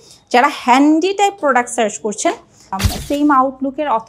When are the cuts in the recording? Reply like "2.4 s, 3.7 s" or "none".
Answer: 2.8 s